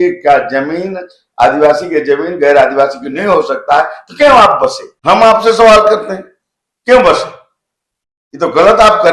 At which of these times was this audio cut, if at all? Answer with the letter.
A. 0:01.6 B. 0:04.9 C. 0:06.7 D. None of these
B